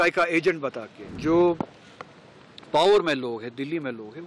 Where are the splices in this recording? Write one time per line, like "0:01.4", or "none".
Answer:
0:01.0